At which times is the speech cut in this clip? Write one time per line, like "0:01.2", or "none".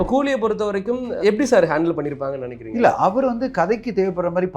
0:01.2